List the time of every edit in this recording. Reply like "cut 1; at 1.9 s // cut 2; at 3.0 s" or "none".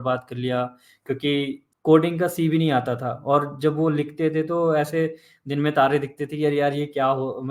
cut 1; at 1.6 s